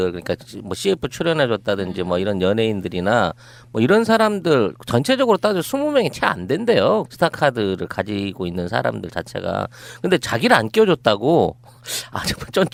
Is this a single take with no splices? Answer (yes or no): yes